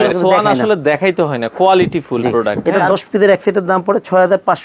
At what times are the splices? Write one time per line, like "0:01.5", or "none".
0:02.5